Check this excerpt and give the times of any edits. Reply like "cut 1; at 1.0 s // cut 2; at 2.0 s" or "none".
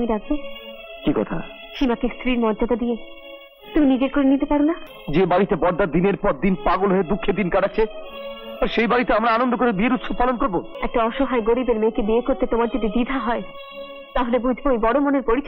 cut 1; at 4.9 s // cut 2; at 10.8 s